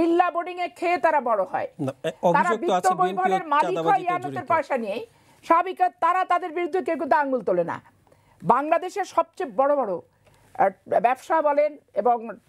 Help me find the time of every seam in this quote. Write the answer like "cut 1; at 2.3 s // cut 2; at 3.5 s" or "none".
none